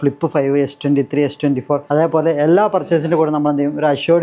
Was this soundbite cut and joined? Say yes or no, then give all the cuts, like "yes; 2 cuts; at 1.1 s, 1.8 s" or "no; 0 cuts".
yes; 1 cut; at 1.8 s